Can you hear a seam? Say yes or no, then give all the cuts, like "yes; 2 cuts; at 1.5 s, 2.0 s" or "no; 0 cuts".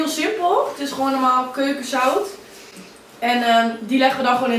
no; 0 cuts